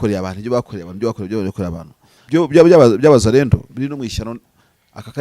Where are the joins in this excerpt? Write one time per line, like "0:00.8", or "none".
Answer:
0:02.1